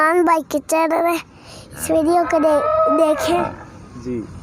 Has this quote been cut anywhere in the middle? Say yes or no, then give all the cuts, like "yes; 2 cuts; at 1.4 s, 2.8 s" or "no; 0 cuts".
no; 0 cuts